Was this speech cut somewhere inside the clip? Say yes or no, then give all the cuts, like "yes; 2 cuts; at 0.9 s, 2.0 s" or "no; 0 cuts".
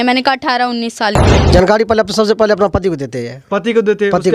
yes; 1 cut; at 1.3 s